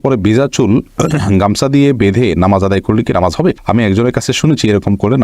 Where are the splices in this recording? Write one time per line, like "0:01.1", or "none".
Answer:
none